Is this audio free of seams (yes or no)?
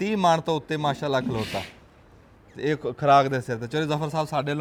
yes